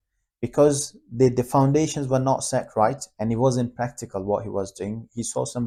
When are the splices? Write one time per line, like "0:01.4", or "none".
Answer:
none